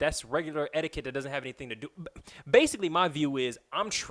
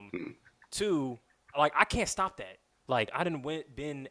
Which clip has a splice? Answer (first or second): second